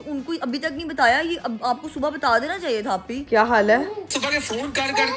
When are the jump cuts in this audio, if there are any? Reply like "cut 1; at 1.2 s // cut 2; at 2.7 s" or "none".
cut 1; at 3.1 s // cut 2; at 4.1 s